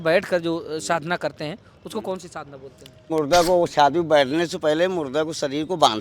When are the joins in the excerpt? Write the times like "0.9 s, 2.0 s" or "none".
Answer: 3.1 s